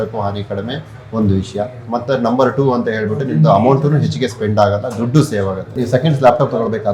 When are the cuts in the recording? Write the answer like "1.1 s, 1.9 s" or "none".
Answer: none